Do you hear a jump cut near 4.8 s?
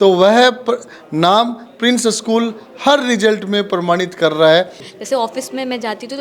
yes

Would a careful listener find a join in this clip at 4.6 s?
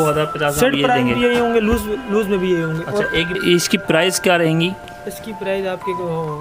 no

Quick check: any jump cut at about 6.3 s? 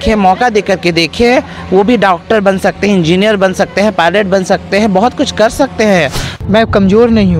yes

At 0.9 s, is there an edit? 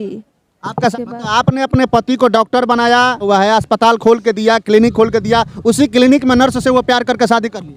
yes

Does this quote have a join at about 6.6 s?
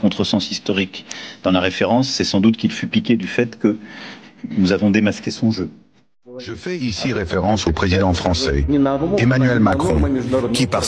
yes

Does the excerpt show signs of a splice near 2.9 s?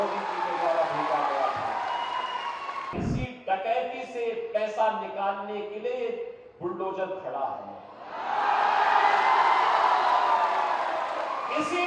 yes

